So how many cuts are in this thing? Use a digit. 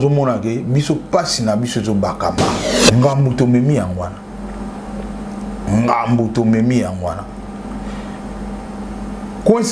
1